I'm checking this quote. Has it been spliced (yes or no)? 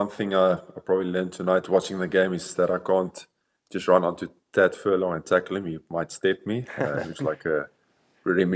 no